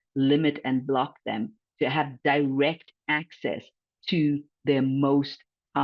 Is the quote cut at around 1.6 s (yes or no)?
no